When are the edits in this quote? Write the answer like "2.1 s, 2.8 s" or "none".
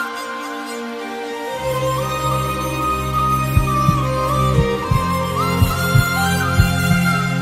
none